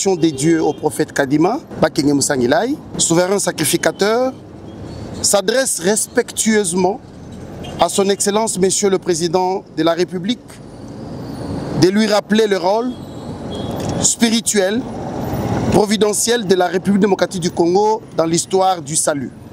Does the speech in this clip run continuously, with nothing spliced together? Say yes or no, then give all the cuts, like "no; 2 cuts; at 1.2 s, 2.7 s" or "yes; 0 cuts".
no; 2 cuts; at 1.7 s, 2.9 s